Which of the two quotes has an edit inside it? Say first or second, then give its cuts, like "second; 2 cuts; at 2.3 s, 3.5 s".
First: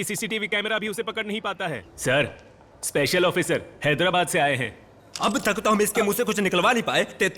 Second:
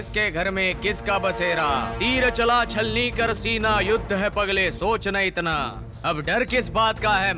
first; 1 cut; at 1.9 s